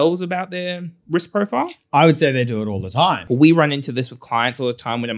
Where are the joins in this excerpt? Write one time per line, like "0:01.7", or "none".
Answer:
0:03.2